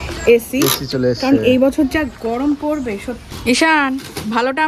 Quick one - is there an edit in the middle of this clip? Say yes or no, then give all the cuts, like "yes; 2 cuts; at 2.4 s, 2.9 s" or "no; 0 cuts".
yes; 1 cut; at 3.3 s